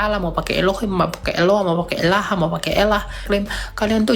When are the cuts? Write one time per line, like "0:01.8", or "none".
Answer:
0:03.2

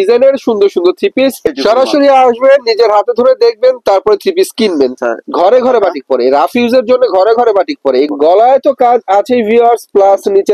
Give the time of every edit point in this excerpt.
0:01.5
0:04.9
0:08.1

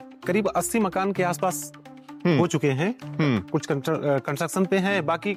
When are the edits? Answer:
none

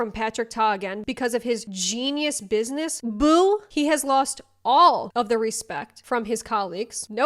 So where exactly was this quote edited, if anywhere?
none

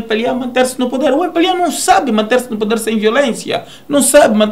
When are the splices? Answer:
none

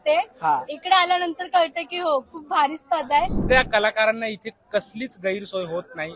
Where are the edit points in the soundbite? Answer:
0:03.4

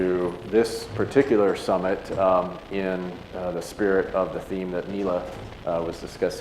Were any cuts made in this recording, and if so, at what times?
0:03.7

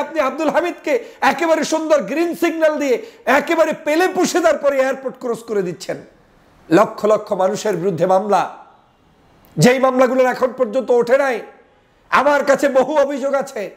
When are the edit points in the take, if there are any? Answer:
none

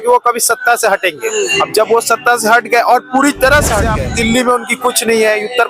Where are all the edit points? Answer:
0:04.0

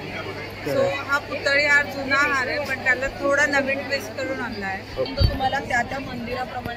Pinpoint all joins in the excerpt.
0:05.1

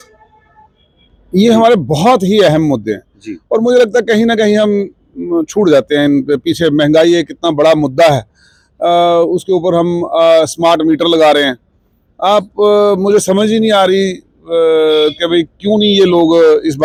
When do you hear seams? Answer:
none

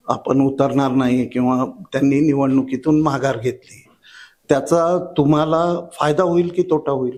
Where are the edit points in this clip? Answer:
none

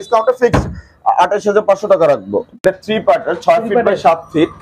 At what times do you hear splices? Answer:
0:02.5

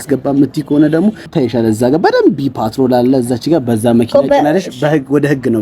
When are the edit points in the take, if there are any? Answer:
0:01.3

